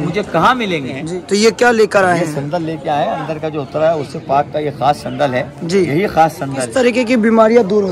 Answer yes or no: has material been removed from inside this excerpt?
yes